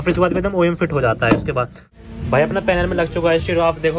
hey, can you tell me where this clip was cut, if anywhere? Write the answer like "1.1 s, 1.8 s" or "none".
1.8 s